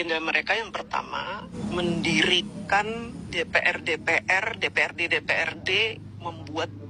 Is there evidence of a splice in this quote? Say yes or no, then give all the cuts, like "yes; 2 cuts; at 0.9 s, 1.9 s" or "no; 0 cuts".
yes; 2 cuts; at 1.5 s, 3.2 s